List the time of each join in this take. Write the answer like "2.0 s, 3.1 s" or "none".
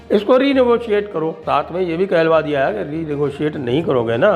1.4 s